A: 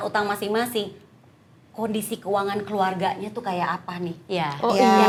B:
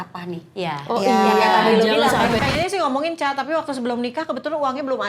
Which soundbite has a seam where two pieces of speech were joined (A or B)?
B